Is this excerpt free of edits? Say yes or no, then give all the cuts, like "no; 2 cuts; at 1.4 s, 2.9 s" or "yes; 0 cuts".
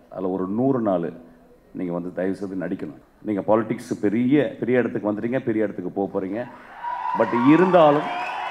no; 1 cut; at 3.1 s